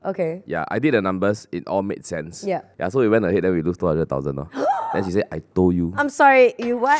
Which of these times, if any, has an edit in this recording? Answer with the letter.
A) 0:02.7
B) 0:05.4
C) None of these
A